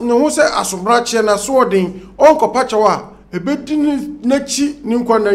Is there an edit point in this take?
no; 0 cuts

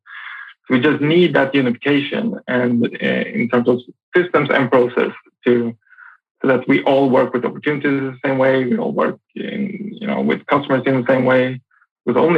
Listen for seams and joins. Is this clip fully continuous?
yes; 0 cuts

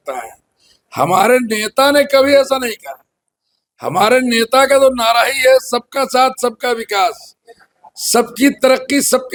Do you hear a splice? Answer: no; 0 cuts

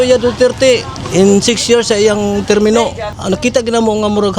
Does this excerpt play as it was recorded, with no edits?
no; 2 cuts; at 1.0 s, 3.1 s

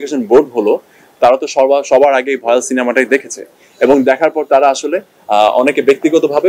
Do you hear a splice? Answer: no; 0 cuts

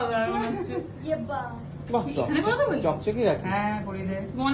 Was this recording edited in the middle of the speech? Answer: no; 0 cuts

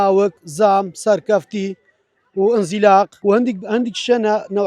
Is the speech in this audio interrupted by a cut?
yes; 1 cut; at 3.1 s

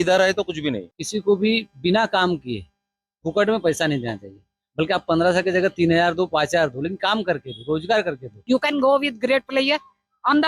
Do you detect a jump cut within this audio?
yes; 2 cuts; at 0.9 s, 8.3 s

